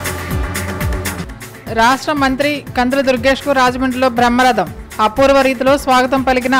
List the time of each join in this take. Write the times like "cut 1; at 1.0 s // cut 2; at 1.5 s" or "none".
cut 1; at 1.2 s